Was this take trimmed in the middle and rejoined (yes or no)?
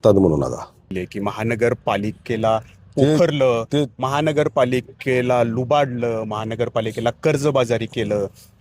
yes